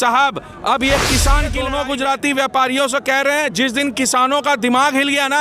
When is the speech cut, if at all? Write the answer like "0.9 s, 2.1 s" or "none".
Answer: 1.6 s